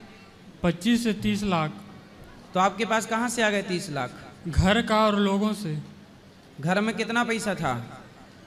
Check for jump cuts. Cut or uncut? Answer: uncut